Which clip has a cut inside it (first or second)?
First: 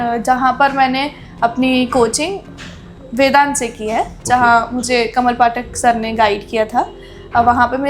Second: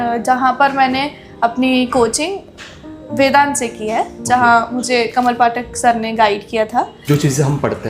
second